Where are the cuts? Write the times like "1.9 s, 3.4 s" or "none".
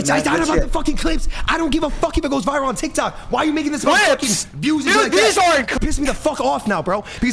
5.7 s